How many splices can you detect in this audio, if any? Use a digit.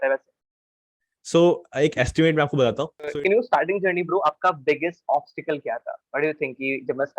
1